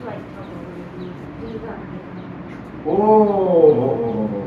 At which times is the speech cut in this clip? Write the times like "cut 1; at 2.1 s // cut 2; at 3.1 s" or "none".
none